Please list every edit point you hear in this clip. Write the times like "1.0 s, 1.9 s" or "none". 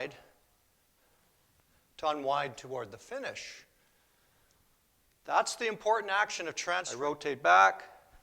6.9 s